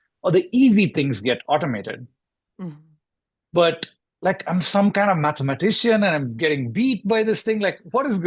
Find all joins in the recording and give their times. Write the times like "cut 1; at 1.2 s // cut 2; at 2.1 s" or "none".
none